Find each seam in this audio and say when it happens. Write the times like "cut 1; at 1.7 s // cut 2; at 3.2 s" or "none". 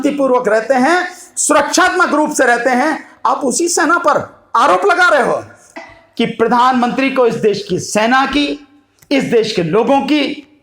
cut 1; at 5.7 s